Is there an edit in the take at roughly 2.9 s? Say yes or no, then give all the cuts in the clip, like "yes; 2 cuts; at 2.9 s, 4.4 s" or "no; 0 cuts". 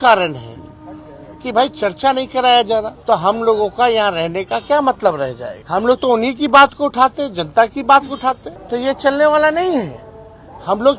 yes; 3 cuts; at 2.9 s, 5.5 s, 8.5 s